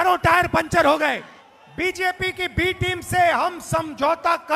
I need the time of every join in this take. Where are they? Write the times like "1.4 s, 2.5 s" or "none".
1.3 s